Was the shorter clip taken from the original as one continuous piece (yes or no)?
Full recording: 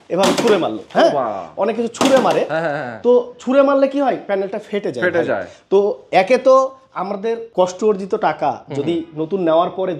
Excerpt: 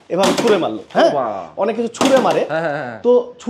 yes